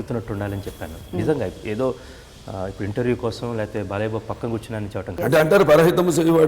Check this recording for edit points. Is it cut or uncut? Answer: cut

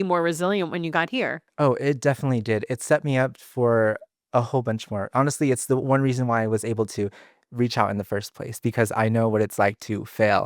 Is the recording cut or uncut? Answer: cut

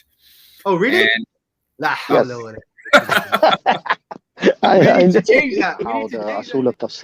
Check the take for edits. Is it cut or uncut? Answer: cut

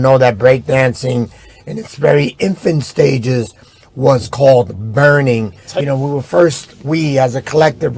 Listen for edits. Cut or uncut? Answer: cut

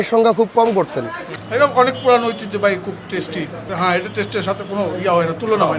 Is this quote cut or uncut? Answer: cut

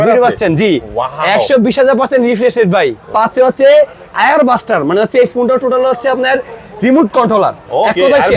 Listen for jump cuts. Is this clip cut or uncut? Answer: cut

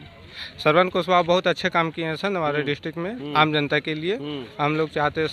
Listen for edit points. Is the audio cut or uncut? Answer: uncut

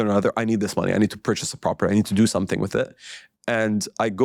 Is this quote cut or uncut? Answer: uncut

